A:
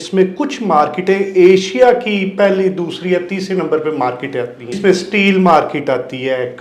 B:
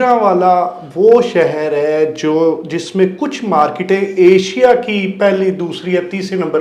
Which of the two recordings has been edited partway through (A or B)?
A